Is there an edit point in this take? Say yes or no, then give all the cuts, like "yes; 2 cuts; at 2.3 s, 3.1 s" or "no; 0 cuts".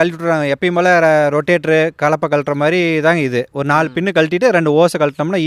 no; 0 cuts